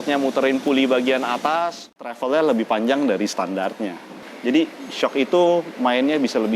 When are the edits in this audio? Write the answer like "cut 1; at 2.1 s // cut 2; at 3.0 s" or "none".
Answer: cut 1; at 2.0 s